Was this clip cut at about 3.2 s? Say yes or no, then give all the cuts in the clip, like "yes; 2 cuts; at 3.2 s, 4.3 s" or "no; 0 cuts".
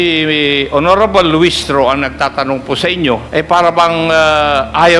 yes; 1 cut; at 3.2 s